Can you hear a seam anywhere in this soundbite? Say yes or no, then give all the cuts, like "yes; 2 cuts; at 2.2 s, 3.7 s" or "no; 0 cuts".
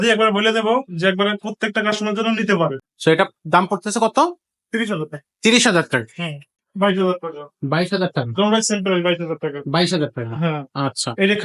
yes; 2 cuts; at 2.9 s, 6.5 s